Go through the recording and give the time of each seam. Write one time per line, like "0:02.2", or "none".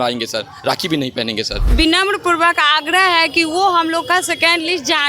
0:01.6